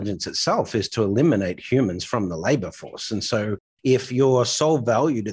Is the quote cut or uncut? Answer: uncut